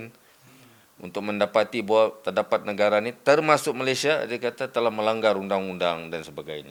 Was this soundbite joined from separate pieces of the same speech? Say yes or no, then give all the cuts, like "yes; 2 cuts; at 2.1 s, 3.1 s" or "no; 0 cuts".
no; 0 cuts